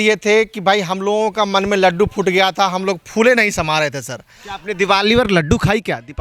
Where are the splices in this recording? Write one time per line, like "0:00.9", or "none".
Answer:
none